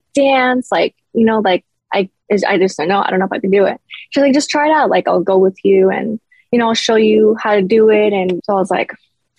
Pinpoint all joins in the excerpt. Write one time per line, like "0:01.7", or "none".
0:08.4